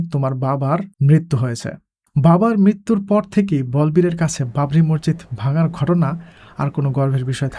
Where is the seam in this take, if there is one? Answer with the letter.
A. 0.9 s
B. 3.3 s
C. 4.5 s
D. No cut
A